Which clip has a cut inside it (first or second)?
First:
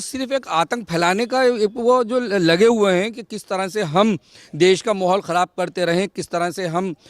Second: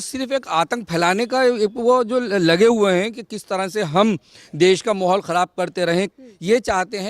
second